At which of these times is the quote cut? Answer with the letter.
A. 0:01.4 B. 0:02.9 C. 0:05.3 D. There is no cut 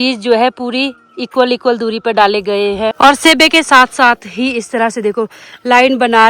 B